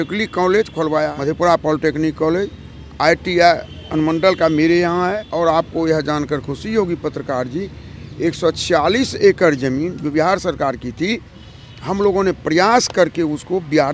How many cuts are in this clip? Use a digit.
2